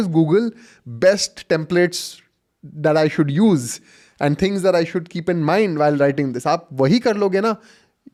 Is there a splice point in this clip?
no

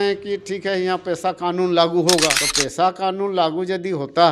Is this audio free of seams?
yes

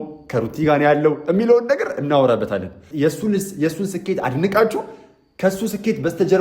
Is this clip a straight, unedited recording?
no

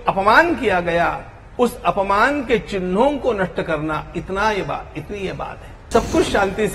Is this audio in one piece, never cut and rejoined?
no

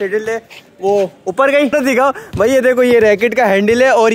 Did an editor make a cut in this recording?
yes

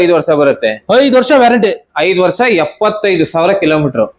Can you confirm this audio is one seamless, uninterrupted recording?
yes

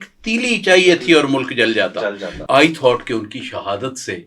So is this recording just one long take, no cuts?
no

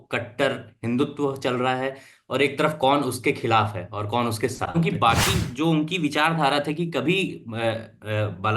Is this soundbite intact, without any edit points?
no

